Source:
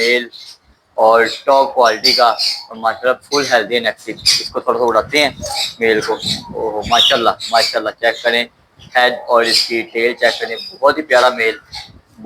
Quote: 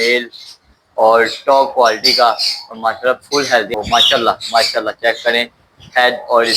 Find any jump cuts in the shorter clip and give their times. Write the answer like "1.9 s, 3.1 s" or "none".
3.7 s

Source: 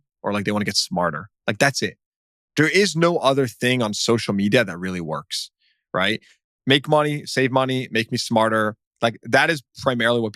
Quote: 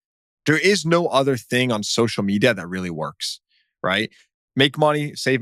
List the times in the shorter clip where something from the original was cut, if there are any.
none

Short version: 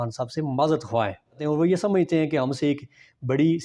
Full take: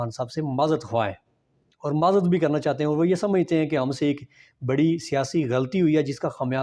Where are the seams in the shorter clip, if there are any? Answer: 1.4 s

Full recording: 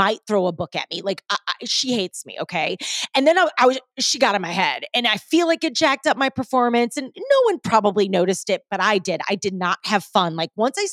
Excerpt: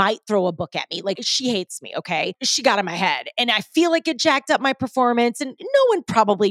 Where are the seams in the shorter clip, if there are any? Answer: 1.2 s, 2.4 s

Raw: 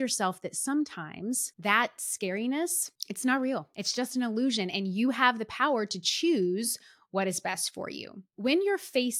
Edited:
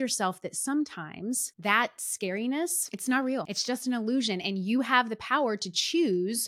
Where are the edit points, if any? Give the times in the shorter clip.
2.9 s, 3.5 s

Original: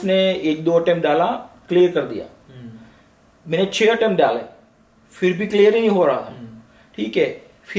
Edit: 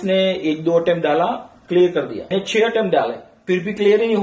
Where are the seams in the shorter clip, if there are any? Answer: 2.3 s, 3.3 s

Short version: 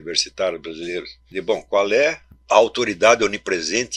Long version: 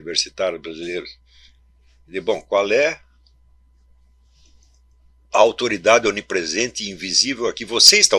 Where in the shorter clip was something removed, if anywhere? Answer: 1.2 s, 2.3 s

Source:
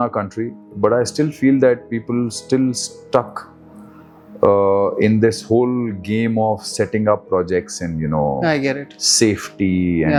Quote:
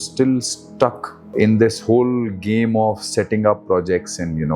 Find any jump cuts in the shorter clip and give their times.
1.3 s

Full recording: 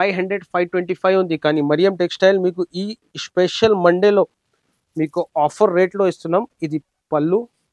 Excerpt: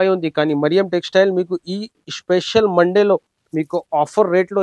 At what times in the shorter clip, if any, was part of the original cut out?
3.4 s

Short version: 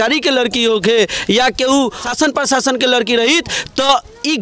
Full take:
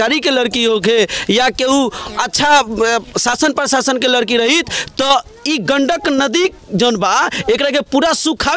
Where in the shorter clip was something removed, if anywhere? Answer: 2.0 s

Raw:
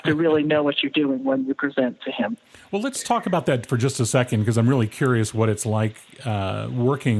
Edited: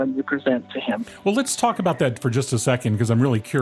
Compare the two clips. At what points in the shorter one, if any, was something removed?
1.1 s

